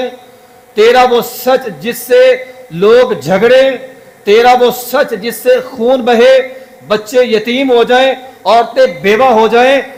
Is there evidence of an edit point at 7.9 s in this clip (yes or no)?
no